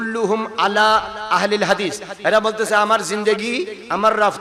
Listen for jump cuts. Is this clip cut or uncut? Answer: uncut